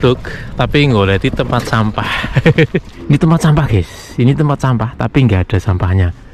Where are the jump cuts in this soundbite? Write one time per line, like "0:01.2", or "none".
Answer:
0:02.9